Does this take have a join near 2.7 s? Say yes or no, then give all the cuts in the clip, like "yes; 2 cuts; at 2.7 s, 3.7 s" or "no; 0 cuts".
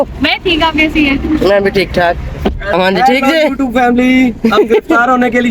yes; 1 cut; at 2.7 s